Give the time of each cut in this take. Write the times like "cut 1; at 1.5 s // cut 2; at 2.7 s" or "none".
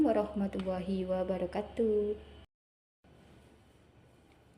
cut 1; at 2.3 s